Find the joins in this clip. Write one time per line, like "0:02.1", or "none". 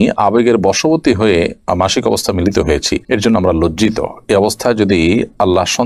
none

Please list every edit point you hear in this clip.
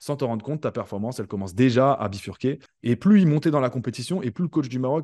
0:02.7

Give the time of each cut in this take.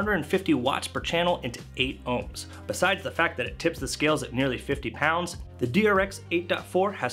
0:02.5
0:05.4

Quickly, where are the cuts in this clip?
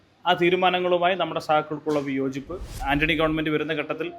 0:02.8

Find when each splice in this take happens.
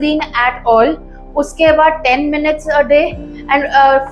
none

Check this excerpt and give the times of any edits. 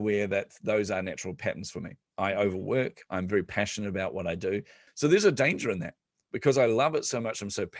0:04.8

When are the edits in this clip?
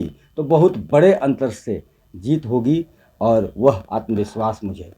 none

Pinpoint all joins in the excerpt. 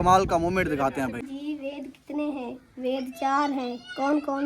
0:01.4

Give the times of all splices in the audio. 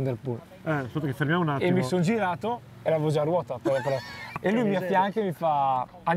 0:04.2

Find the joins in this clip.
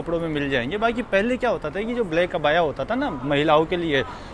none

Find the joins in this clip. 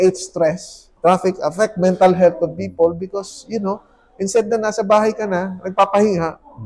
0:00.9

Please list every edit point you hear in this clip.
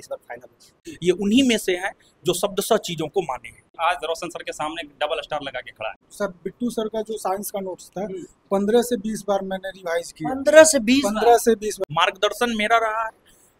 0:00.9
0:03.7
0:06.0
0:11.8

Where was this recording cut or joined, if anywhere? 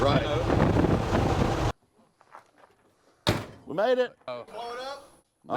0:01.7
0:04.3

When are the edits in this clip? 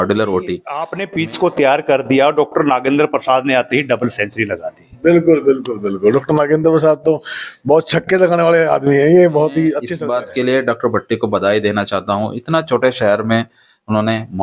0:01.0
0:09.9

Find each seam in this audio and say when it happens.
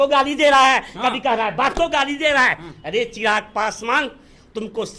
none

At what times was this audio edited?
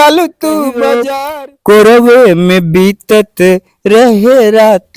0:01.1

